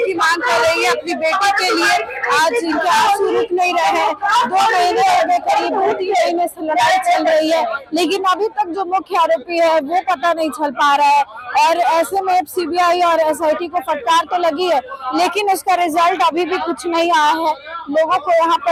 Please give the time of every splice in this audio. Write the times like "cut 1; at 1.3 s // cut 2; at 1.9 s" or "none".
none